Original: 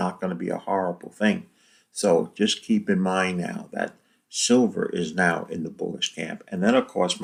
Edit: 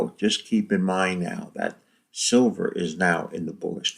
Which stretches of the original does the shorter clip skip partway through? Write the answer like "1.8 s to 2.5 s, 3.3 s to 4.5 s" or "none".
none